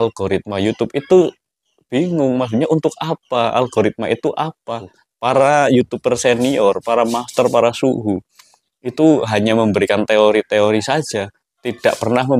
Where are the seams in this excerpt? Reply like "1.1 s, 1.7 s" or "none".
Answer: 5.0 s